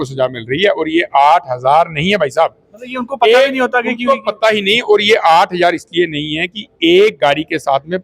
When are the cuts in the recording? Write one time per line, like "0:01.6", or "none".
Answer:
none